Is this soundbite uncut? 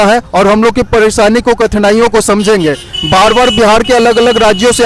yes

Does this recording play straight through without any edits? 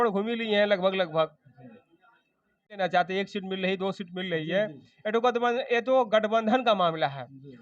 no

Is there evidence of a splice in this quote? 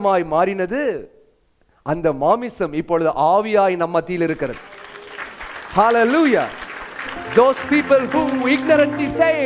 no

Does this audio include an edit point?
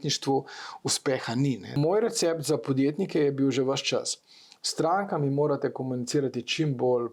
yes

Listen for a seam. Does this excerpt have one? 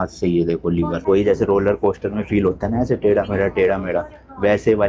yes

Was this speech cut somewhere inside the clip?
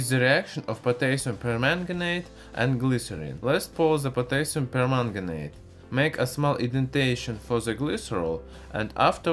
no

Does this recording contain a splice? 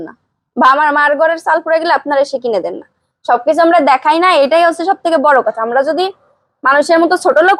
no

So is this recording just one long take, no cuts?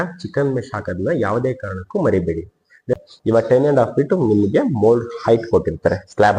no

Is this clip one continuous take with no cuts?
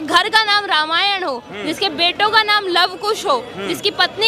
yes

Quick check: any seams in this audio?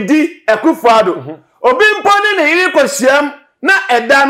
no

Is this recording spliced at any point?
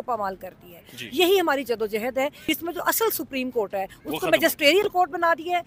yes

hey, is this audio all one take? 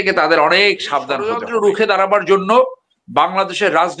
no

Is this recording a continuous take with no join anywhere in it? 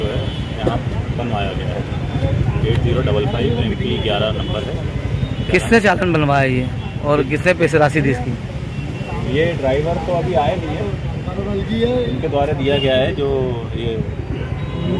yes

